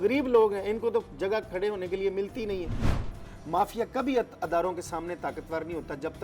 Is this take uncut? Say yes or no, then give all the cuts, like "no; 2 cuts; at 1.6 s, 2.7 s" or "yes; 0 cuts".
no; 1 cut; at 3.0 s